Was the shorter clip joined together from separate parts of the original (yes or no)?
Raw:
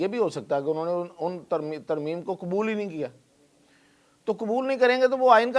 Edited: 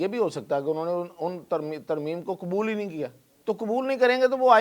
yes